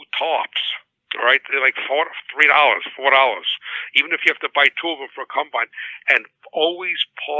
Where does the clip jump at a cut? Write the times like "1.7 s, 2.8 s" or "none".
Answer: none